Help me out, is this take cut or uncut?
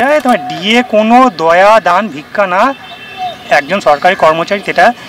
uncut